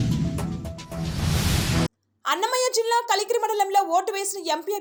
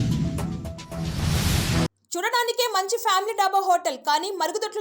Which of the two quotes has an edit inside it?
second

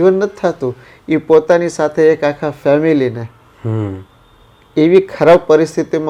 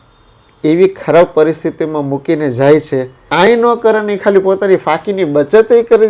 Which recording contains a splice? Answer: second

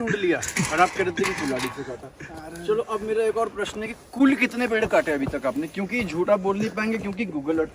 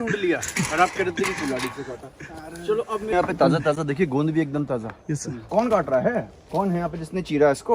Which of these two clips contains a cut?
second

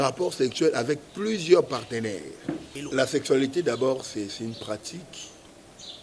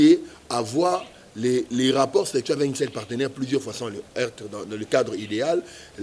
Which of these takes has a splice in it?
first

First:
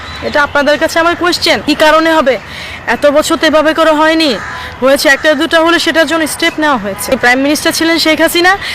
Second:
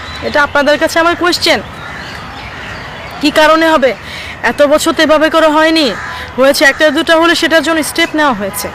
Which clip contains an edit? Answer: first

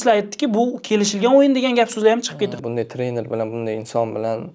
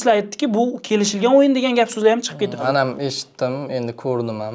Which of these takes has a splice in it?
first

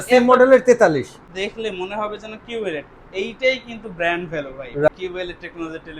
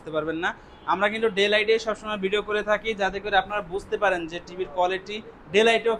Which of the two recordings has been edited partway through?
first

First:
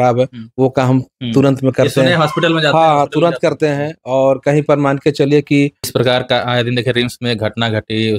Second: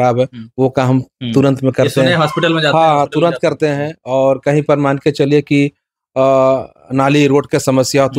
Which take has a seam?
first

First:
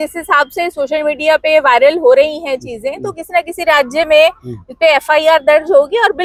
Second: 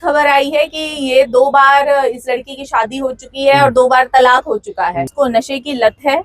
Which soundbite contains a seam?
second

